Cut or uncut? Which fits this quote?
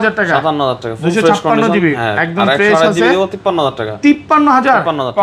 uncut